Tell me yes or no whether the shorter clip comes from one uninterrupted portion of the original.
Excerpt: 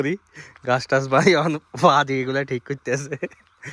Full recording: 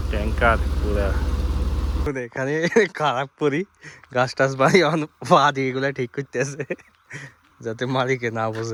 yes